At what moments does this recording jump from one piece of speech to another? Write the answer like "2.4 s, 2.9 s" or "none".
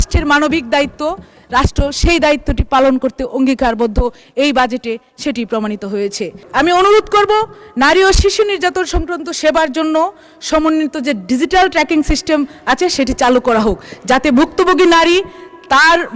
6.5 s